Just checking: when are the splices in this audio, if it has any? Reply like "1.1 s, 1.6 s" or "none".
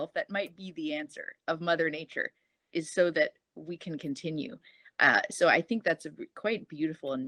none